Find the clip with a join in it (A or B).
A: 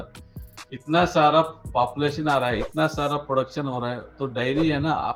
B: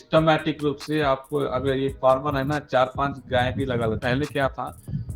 B